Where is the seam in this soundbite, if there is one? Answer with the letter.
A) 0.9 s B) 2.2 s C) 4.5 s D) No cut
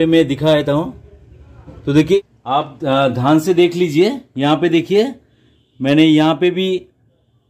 B